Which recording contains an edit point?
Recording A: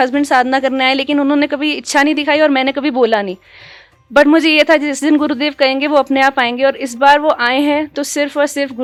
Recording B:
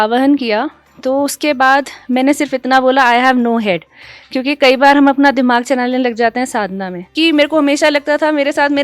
B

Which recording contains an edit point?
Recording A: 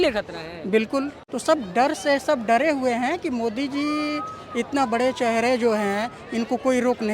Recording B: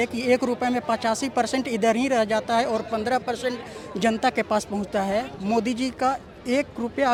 A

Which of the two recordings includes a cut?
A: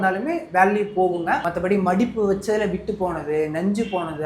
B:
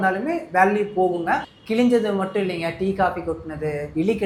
A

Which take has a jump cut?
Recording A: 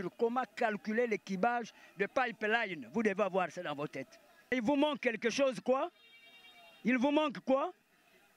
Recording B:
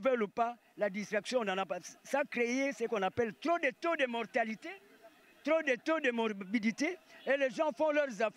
A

